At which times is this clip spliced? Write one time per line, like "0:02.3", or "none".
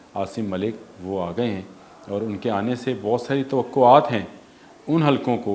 none

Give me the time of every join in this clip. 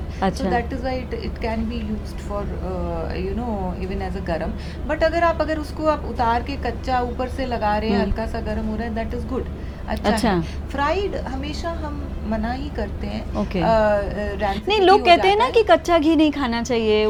none

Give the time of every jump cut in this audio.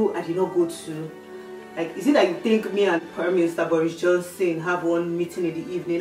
none

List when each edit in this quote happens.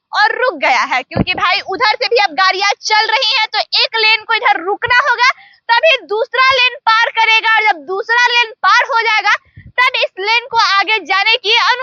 none

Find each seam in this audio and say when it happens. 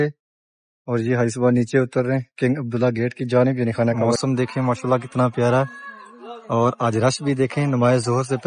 0:04.1

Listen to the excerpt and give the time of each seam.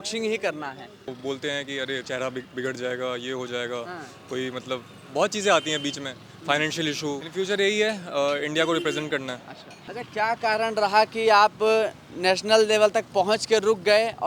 0:01.2
0:07.3
0:10.0

